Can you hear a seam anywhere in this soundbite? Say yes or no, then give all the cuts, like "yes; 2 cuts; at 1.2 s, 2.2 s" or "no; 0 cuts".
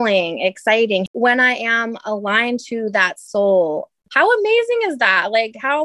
yes; 2 cuts; at 1.1 s, 4.0 s